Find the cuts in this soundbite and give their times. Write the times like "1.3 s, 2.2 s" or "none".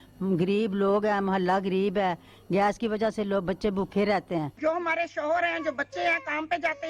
4.6 s